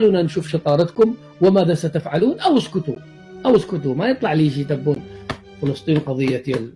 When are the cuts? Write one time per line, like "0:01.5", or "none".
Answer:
none